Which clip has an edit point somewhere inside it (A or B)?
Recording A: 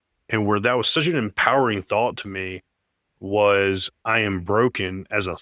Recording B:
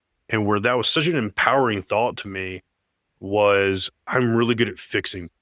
A